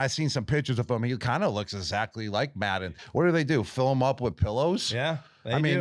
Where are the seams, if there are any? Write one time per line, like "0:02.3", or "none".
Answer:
0:03.0